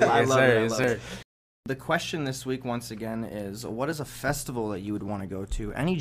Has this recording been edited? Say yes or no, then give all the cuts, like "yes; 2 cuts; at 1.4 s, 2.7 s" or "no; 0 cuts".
yes; 1 cut; at 1.5 s